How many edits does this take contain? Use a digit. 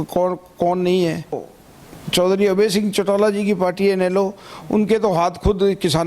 1